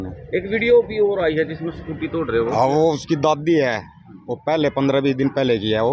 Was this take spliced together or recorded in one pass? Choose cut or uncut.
uncut